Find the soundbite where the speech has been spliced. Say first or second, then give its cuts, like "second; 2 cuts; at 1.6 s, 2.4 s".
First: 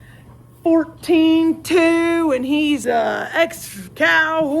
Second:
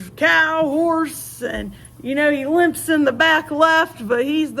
first; 1 cut; at 2.8 s